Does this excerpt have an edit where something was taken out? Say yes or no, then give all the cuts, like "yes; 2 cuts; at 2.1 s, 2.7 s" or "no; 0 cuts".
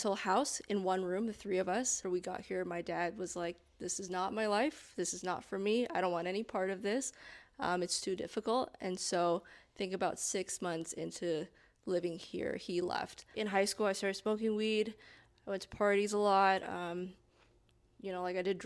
yes; 2 cuts; at 2.0 s, 13.3 s